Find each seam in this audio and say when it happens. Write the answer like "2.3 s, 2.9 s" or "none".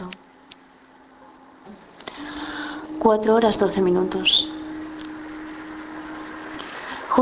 none